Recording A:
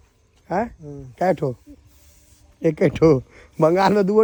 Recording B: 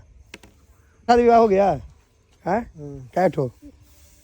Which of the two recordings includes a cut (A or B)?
B